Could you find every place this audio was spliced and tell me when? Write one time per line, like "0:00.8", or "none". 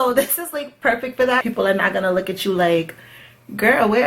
0:01.4

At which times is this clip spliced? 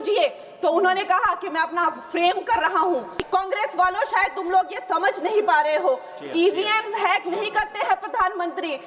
0:03.2

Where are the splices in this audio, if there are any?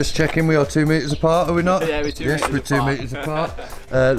none

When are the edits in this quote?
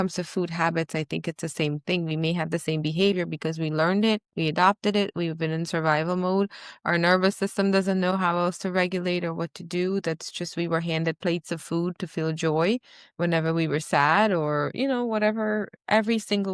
none

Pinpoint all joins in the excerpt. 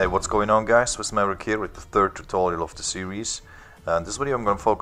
none

